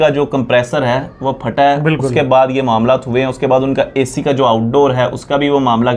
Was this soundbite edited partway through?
no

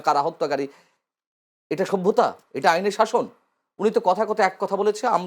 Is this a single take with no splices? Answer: yes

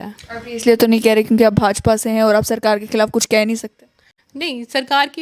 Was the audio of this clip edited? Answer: no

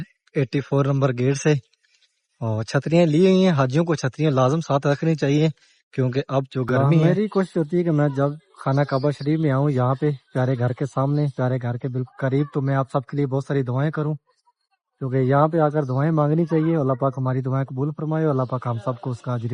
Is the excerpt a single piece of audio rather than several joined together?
no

